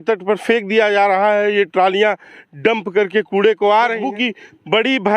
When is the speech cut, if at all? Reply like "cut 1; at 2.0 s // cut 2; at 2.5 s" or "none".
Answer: cut 1; at 4.0 s